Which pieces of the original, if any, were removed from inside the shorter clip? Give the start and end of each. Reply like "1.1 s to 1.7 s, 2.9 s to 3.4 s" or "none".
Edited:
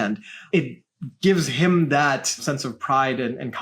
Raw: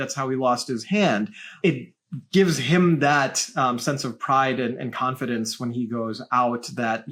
3.5 s to 3.8 s